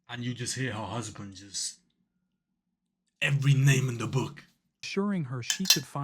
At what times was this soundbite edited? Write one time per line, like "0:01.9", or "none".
0:04.9